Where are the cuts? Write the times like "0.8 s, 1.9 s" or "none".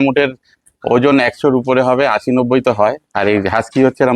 none